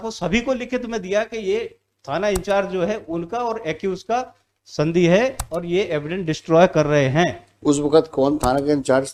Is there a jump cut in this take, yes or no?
no